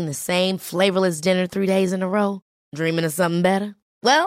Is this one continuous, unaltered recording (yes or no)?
yes